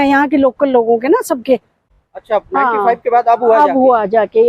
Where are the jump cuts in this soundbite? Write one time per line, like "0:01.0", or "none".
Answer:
0:01.8